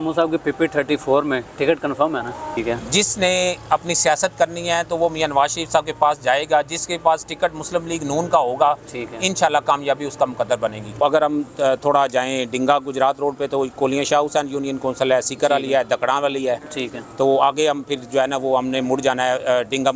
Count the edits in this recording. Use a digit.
2